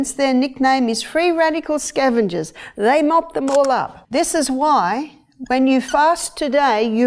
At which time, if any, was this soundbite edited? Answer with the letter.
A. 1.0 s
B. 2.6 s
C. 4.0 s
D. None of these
C